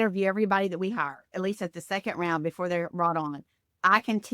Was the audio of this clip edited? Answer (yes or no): yes